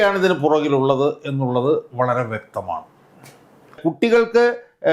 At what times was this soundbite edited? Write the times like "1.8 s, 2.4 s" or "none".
3.8 s

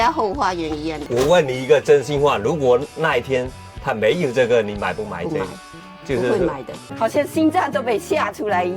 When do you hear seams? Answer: 1.0 s, 6.8 s

